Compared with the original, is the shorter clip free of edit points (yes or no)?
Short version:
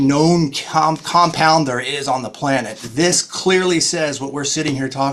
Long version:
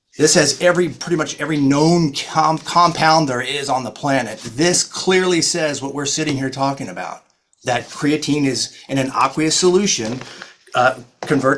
yes